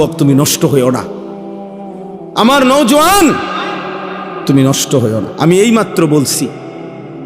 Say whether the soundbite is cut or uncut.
cut